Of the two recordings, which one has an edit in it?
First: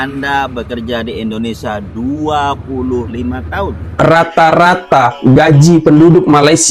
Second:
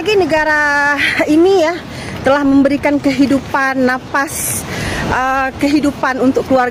first; 1 cut; at 3.8 s

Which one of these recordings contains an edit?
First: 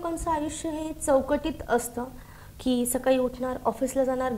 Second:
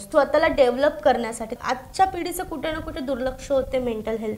second; 1 cut; at 1.6 s

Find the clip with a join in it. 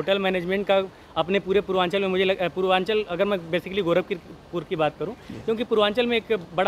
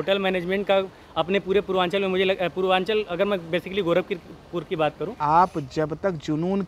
second; 1 cut; at 5.1 s

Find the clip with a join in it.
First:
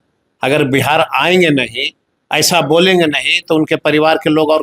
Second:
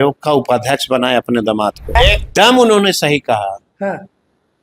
second; 1 cut; at 1.9 s

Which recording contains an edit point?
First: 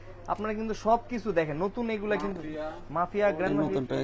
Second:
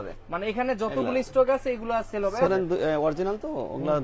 second; 1 cut; at 2.5 s

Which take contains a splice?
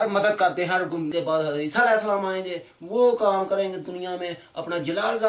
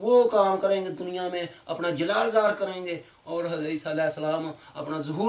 first; 1 cut; at 1.1 s

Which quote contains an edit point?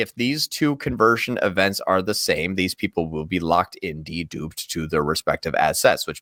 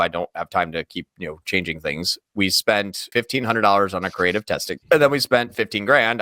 second; 2 cuts; at 3.0 s, 4.7 s

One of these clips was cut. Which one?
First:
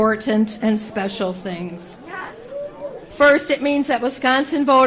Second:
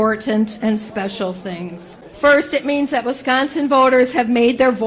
second; 1 cut; at 2.1 s

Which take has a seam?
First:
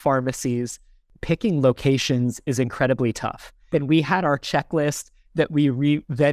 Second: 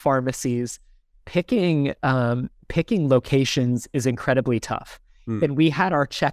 first; 2 cuts; at 1.1 s, 3.5 s

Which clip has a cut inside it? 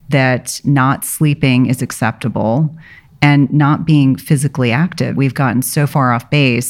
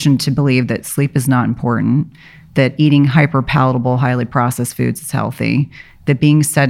first; 1 cut; at 5.1 s

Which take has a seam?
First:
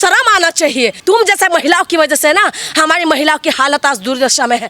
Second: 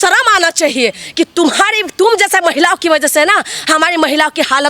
first; 1 cut; at 1.0 s

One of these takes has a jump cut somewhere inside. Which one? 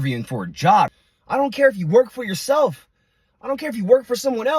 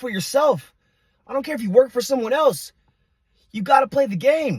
first; 1 cut; at 1.0 s

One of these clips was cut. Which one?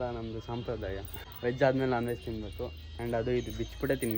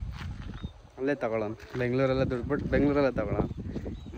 first; 1 cut; at 1.1 s

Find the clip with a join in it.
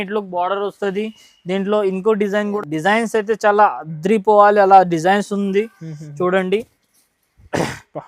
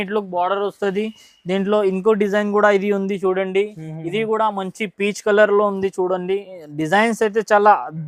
first; 1 cut; at 2.5 s

